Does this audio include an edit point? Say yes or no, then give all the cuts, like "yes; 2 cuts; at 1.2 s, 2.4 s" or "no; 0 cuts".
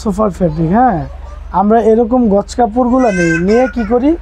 no; 0 cuts